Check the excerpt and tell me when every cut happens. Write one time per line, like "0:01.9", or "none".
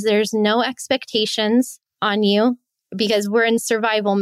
0:01.9
0:02.6